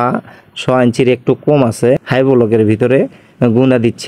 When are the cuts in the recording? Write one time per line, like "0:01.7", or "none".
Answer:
0:02.0